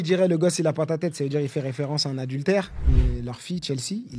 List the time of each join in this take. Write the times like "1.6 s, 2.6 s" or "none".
2.8 s